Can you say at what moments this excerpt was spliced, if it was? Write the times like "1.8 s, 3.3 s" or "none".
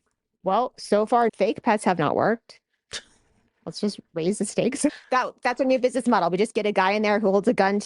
1.3 s, 4.9 s